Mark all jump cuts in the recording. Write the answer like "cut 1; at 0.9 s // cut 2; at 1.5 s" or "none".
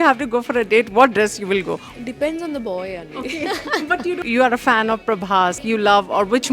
cut 1; at 1.8 s // cut 2; at 4.2 s // cut 3; at 5.6 s